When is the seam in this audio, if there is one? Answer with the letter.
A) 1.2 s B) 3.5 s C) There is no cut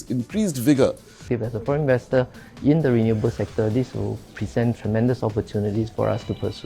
A